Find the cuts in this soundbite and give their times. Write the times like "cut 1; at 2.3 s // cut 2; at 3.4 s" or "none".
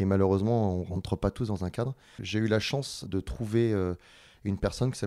cut 1; at 2.2 s // cut 2; at 3.1 s